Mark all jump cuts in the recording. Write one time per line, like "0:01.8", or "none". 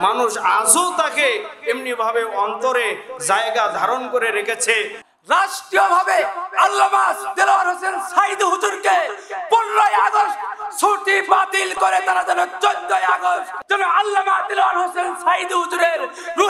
0:05.0
0:13.6